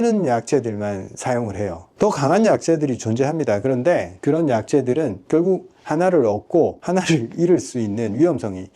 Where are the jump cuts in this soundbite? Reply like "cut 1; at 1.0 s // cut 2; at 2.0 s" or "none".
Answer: cut 1; at 1.8 s // cut 2; at 6.8 s